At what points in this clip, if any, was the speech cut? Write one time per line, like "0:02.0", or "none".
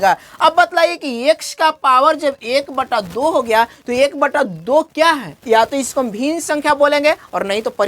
0:05.3